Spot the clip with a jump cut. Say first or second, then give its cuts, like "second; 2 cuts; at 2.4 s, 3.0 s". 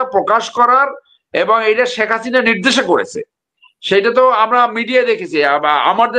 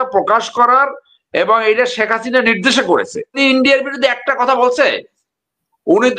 second; 1 cut; at 3.4 s